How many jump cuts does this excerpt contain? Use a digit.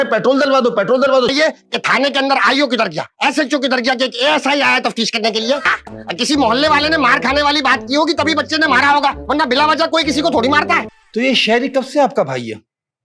3